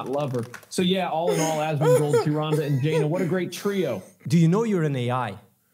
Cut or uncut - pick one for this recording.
cut